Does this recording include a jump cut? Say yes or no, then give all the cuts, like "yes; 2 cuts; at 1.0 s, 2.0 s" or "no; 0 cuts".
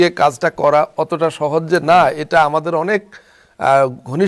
no; 0 cuts